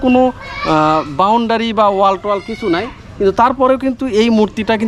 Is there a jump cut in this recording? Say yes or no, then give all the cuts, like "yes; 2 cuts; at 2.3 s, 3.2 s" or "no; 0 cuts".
no; 0 cuts